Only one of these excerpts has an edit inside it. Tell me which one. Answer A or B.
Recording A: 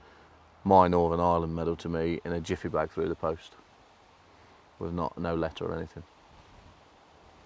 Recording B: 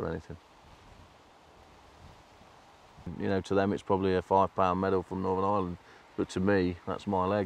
B